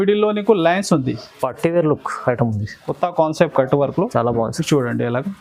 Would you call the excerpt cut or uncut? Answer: uncut